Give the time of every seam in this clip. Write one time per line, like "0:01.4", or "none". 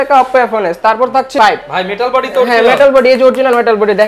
0:01.3